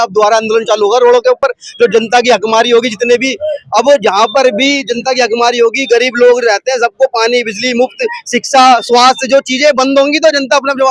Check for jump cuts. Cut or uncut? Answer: uncut